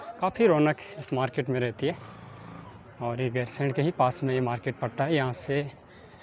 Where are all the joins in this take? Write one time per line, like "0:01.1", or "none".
none